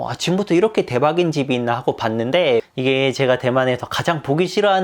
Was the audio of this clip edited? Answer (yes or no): yes